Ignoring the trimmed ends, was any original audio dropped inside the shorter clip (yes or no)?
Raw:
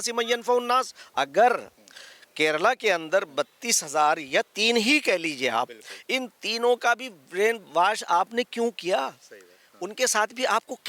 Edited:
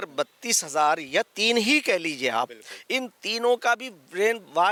no